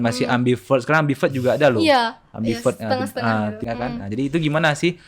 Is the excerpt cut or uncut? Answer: cut